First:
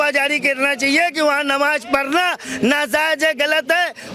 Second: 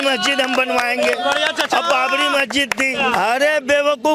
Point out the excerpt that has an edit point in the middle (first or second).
second